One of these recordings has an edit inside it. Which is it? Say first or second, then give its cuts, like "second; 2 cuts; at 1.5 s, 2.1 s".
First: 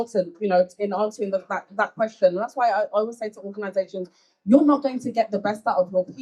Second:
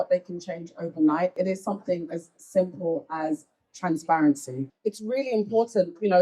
second; 2 cuts; at 1.4 s, 4.7 s